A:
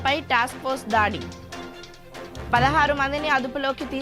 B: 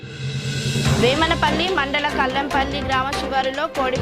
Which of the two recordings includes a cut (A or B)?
B